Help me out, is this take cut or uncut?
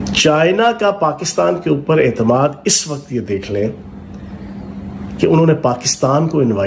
uncut